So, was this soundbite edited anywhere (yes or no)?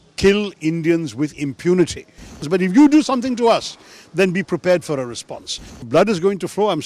yes